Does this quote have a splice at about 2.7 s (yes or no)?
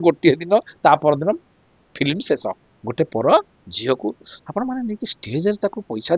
yes